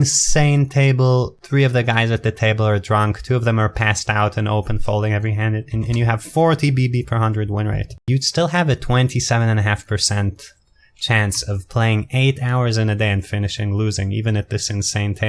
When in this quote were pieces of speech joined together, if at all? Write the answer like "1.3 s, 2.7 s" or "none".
1.4 s, 7.9 s